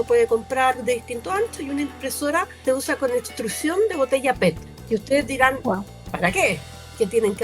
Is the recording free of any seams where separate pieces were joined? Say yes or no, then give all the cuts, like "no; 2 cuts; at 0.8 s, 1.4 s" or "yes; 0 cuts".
no; 2 cuts; at 2.6 s, 4.6 s